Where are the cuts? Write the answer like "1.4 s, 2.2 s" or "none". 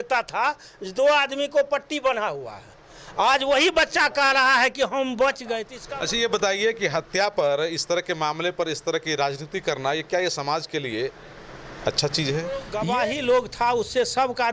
5.7 s, 12.7 s